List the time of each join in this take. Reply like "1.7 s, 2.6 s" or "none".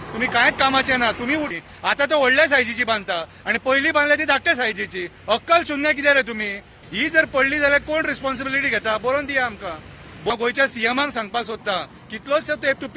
1.5 s, 6.7 s, 10.3 s